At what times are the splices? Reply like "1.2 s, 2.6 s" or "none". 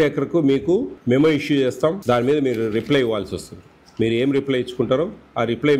0.9 s, 2.0 s